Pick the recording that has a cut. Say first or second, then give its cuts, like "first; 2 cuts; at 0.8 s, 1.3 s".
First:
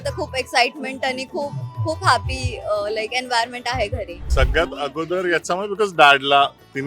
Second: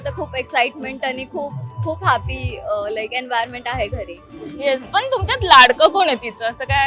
first; 1 cut; at 4.2 s